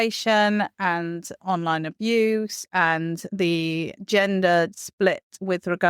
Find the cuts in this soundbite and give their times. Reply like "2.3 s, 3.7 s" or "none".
3.7 s, 5.1 s